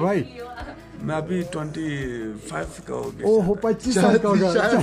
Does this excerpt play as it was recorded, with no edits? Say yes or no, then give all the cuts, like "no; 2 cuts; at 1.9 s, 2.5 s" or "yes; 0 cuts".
yes; 0 cuts